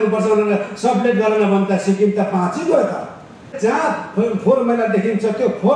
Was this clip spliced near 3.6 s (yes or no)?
yes